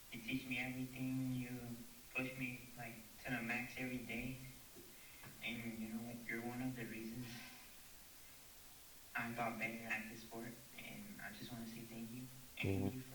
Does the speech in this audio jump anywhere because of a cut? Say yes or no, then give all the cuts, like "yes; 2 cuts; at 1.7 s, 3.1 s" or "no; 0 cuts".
no; 0 cuts